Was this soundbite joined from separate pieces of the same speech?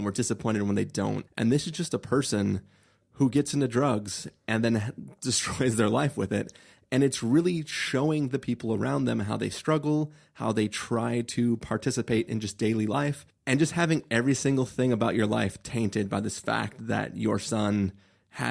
yes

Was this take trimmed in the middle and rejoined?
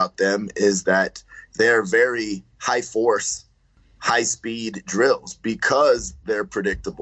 yes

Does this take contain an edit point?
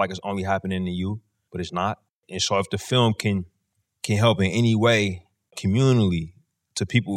yes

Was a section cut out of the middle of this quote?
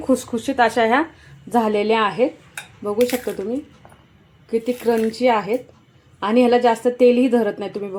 no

